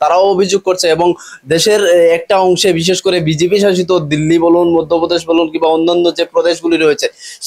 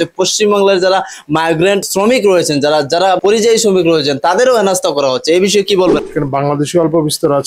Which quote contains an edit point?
second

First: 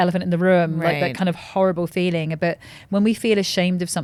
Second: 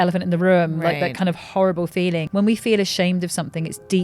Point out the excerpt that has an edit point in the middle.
second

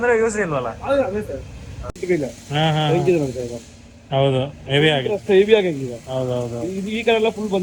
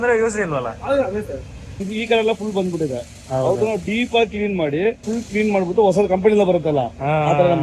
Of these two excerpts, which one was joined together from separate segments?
second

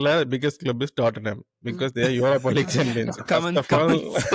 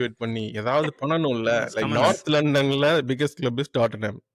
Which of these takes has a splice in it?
second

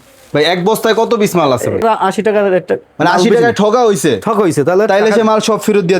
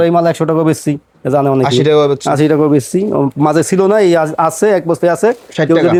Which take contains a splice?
first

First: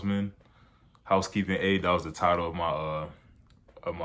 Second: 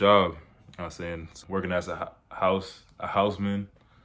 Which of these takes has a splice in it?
second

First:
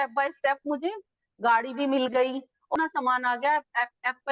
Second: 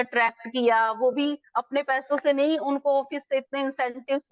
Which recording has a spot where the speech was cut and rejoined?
first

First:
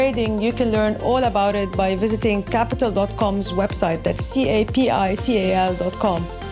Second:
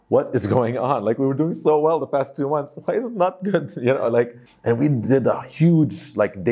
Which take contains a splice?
second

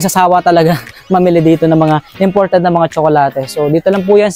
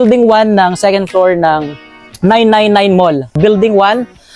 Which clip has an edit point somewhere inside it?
second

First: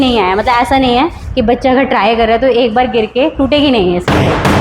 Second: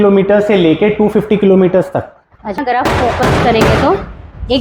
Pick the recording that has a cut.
second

